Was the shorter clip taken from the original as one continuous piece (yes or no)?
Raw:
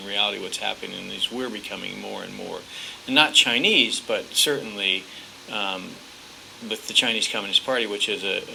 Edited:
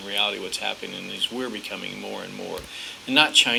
yes